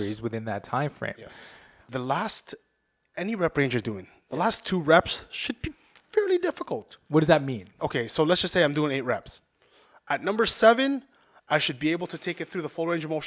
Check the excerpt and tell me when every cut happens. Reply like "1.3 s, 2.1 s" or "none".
1.9 s, 7.7 s